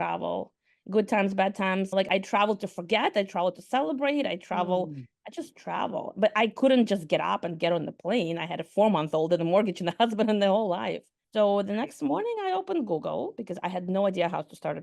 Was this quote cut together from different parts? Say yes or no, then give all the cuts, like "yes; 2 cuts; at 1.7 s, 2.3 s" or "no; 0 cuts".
yes; 1 cut; at 2.1 s